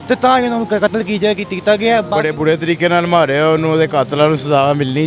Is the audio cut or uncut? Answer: cut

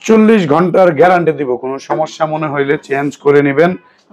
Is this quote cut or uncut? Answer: uncut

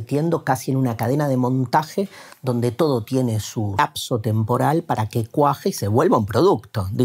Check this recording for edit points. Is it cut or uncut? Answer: cut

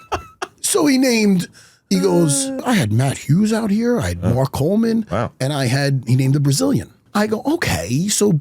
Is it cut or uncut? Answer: cut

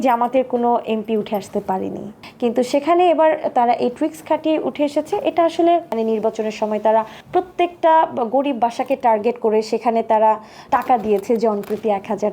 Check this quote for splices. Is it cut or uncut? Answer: cut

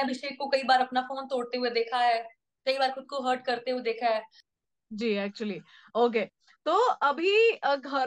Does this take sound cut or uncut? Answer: uncut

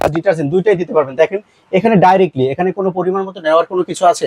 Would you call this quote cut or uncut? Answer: uncut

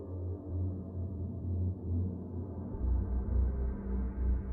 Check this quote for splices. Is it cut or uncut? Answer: uncut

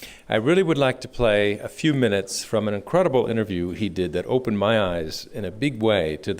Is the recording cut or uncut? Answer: cut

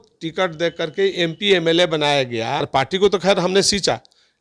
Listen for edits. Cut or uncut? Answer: cut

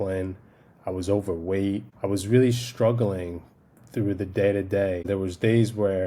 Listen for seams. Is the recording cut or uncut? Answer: cut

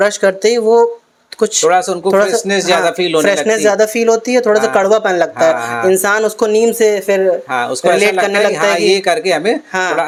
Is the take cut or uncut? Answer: uncut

